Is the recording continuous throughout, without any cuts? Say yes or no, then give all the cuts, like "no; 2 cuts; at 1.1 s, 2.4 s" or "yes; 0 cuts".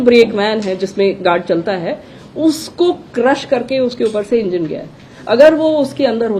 yes; 0 cuts